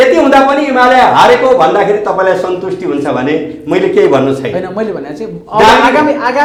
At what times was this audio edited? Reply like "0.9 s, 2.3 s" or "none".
none